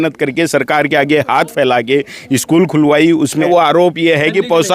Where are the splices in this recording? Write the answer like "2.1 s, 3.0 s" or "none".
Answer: 3.5 s